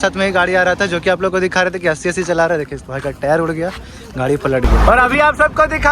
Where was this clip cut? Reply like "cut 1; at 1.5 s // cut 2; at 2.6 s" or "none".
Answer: cut 1; at 4.7 s